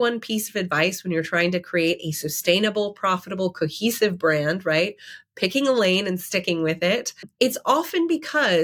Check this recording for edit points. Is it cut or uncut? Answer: cut